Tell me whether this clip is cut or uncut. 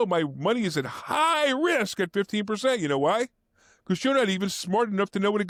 uncut